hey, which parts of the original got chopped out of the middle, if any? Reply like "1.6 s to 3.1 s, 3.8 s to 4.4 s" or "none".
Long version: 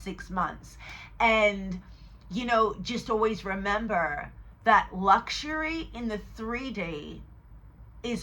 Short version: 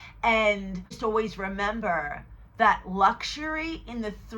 1.9 s to 3.0 s

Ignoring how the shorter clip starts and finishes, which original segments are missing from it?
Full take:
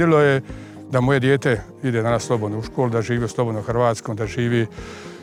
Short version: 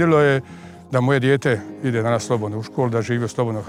none

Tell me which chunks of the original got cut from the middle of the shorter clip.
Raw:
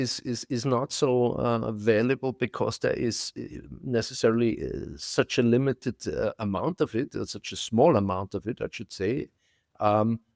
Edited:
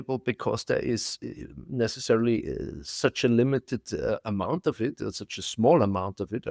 none

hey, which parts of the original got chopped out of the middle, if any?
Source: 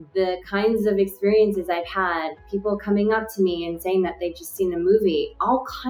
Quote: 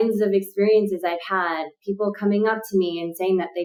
none

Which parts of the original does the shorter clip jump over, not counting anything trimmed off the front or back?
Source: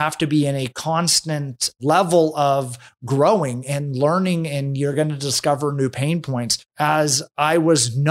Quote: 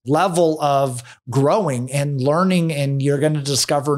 none

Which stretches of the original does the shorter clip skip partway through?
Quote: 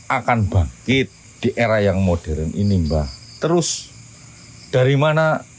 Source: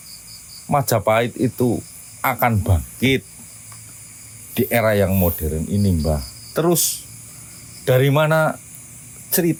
3.4 s to 4.4 s

